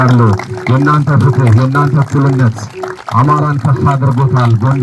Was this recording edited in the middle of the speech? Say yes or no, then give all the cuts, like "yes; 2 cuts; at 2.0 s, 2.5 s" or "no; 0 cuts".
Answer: no; 0 cuts